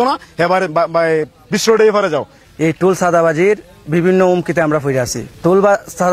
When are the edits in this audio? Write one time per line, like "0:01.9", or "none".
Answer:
0:02.4
0:05.2